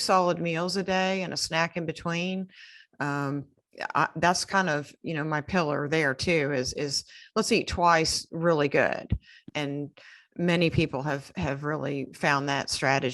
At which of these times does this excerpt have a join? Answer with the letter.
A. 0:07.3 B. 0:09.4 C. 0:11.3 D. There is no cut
B